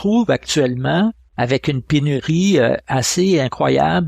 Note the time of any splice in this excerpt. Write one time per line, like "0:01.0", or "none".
0:01.2